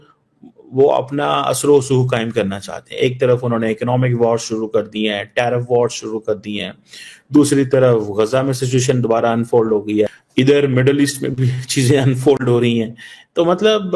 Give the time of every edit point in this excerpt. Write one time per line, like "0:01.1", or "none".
none